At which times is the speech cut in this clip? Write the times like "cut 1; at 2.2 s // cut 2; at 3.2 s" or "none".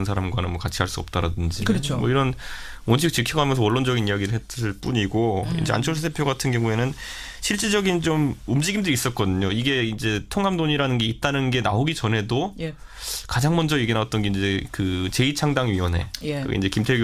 cut 1; at 3.4 s